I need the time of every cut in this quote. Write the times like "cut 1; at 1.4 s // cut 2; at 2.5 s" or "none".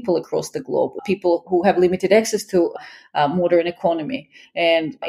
cut 1; at 0.9 s